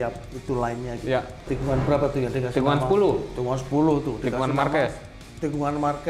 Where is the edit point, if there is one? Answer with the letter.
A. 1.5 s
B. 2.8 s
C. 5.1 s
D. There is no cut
A